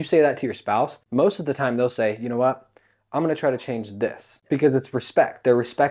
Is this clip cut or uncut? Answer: cut